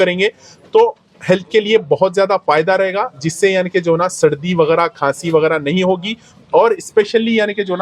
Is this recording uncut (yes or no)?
yes